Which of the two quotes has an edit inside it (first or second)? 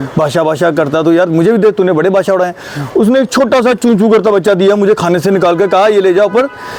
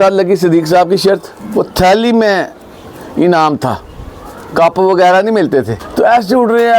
second